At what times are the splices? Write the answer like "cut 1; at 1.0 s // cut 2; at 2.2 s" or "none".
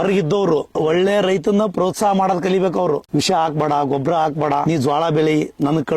cut 1; at 0.8 s // cut 2; at 3.0 s // cut 3; at 4.6 s